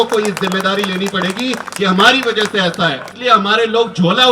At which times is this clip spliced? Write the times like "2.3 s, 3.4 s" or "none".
3.1 s